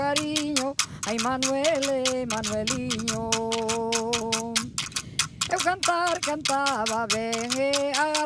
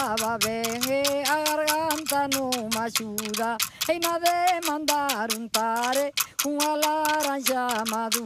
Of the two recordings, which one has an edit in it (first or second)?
second